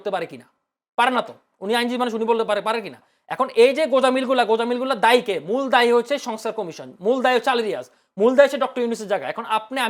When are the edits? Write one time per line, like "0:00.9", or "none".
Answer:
none